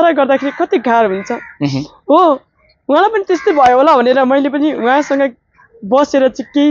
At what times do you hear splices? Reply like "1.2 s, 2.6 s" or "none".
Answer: none